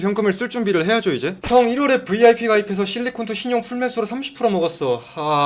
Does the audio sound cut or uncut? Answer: cut